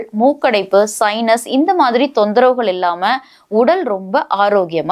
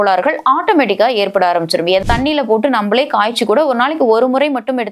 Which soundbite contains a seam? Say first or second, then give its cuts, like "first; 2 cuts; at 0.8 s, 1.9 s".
second; 1 cut; at 2.0 s